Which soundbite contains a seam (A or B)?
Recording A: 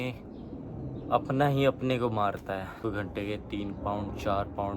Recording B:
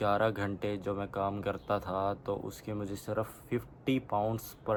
A